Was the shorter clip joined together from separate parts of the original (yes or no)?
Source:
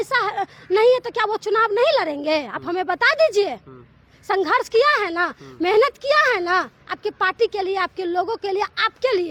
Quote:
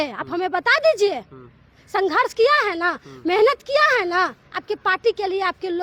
no